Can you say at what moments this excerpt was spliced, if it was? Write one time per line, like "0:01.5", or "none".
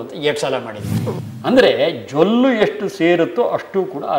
0:01.2